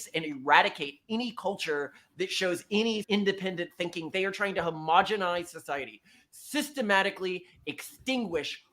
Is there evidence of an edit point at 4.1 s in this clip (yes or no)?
yes